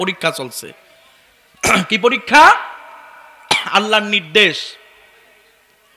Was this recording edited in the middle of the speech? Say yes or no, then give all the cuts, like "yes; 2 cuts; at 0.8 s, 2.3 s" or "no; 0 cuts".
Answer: no; 0 cuts